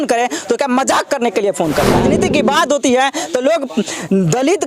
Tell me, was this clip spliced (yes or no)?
yes